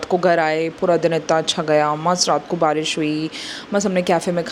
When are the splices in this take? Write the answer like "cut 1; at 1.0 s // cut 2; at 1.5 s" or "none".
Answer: none

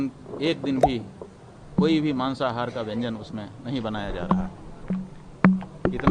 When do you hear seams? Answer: none

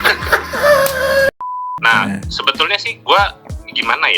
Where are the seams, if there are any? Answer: cut 1; at 1.3 s

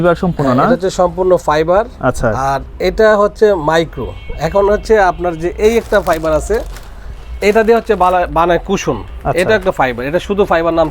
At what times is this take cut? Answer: none

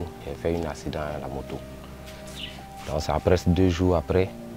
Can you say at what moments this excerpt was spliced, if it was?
none

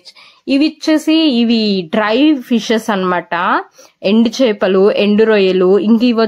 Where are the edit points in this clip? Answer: none

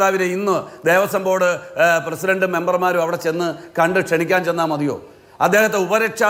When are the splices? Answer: none

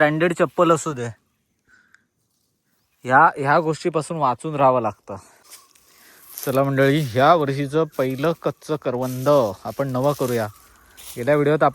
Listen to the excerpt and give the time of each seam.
cut 1; at 5.6 s

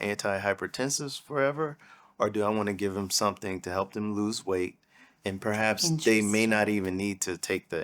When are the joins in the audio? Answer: none

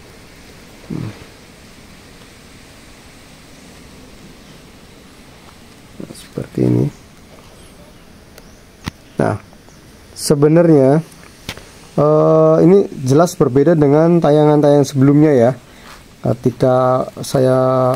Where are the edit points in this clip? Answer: none

